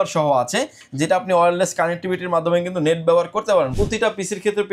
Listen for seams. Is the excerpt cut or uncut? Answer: cut